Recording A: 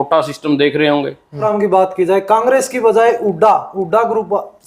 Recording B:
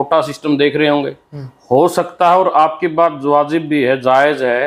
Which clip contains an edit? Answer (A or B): A